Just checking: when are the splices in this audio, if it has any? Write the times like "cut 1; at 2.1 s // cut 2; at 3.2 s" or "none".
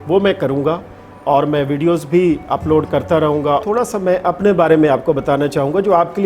cut 1; at 3.6 s